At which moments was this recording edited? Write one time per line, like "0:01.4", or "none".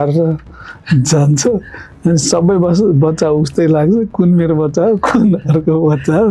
none